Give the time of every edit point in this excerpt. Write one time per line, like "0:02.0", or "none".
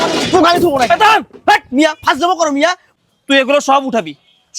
0:02.8